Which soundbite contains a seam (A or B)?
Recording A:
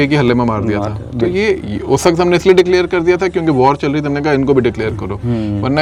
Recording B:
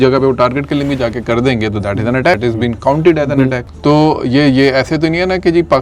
B